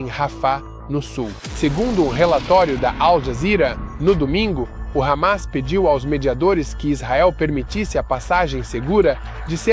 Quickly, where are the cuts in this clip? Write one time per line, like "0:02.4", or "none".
0:01.4